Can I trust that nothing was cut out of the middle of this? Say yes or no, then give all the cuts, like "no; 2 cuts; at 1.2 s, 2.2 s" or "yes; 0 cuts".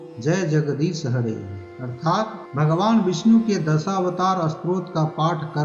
no; 1 cut; at 2.4 s